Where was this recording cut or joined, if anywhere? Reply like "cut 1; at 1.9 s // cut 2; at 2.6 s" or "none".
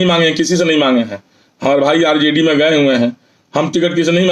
none